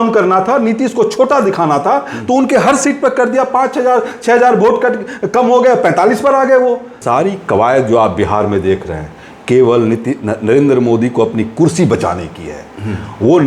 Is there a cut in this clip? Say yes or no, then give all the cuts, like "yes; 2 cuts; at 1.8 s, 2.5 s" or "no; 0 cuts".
yes; 1 cut; at 7.0 s